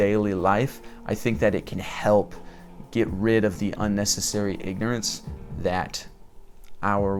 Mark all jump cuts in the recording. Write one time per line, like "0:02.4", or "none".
none